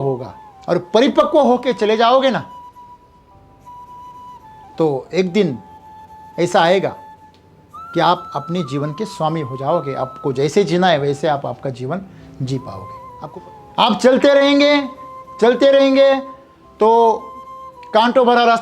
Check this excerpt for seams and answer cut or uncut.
cut